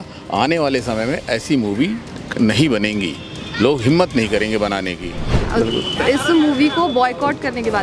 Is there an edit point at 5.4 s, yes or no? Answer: yes